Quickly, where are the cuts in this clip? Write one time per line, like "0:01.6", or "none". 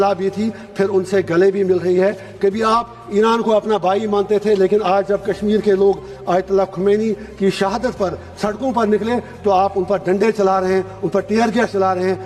none